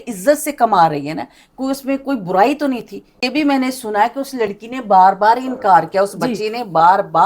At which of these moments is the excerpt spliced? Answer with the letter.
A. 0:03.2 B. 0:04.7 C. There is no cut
A